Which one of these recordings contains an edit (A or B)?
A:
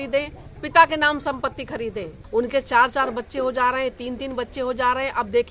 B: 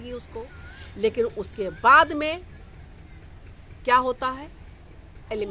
A